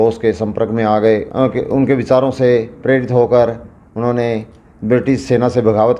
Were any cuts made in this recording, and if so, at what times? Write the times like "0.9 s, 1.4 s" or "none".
1.3 s